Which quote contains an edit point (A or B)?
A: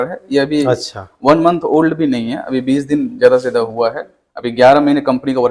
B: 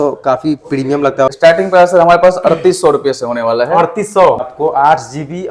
B